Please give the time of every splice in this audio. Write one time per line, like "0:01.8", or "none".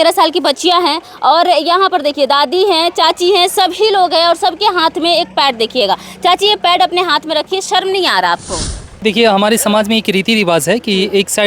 0:09.0